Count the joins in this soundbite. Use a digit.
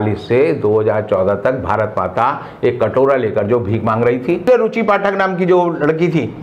1